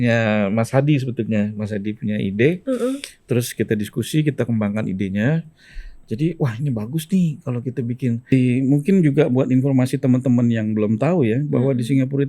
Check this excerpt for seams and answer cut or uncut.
cut